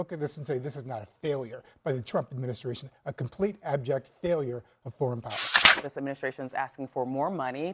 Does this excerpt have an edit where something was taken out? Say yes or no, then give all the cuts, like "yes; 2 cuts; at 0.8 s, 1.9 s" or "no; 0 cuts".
yes; 1 cut; at 5.7 s